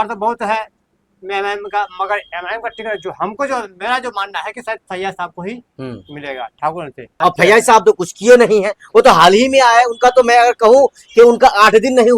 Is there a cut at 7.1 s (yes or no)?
yes